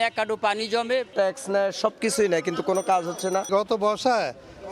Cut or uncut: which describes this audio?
uncut